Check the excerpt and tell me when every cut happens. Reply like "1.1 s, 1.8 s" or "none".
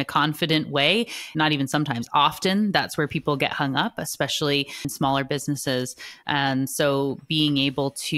1.3 s, 4.8 s